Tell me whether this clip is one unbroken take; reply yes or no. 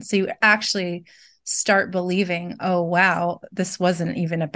yes